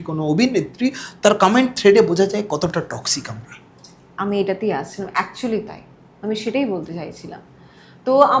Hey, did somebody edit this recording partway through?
no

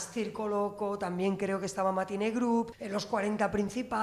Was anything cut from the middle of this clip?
yes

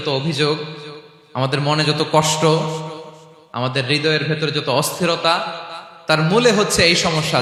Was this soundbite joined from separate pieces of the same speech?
no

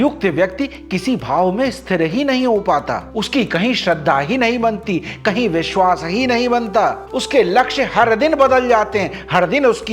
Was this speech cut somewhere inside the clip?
no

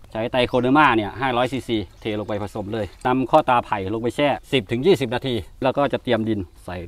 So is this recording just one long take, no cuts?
no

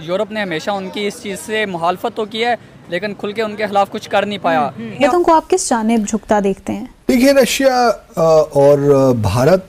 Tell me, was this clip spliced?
yes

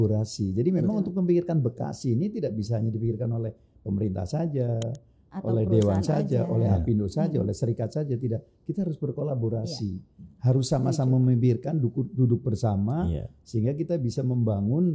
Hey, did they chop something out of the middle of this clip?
no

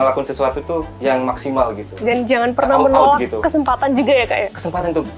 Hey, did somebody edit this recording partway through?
yes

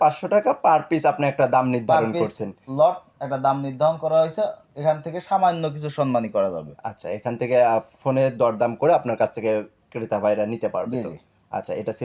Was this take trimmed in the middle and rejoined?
no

